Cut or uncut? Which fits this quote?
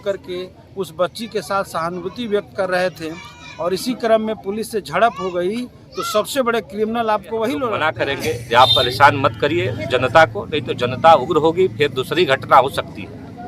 cut